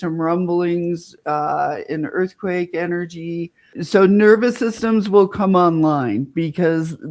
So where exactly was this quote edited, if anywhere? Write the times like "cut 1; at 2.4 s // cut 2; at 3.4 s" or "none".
cut 1; at 3.7 s